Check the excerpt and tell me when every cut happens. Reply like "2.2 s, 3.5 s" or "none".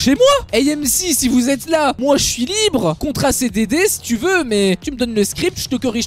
4.8 s